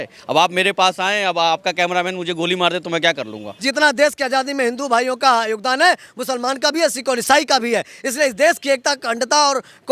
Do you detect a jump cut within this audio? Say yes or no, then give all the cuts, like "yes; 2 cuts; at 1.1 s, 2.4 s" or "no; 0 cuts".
yes; 1 cut; at 3.5 s